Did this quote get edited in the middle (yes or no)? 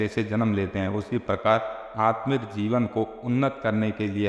no